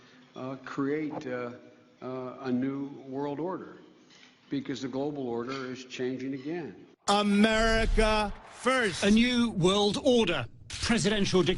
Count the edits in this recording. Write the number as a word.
two